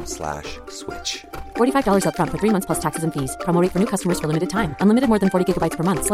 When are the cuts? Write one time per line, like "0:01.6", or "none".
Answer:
none